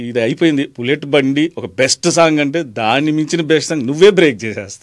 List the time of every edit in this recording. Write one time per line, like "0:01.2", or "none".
none